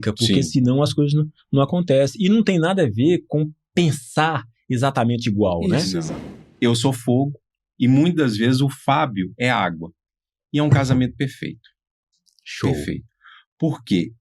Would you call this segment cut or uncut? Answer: cut